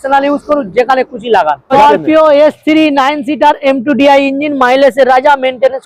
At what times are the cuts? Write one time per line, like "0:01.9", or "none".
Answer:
0:01.7